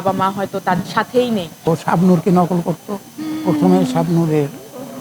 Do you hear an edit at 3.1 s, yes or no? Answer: no